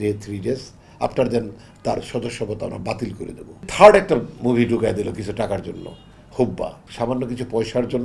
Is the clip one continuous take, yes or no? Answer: no